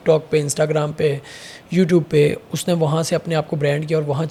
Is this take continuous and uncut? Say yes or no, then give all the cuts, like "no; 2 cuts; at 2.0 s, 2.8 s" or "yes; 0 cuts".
yes; 0 cuts